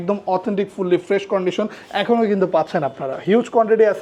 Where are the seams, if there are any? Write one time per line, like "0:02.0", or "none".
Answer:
none